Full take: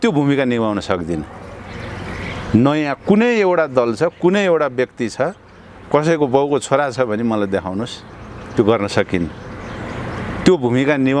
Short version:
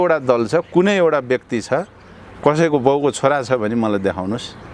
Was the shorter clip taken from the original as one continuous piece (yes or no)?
yes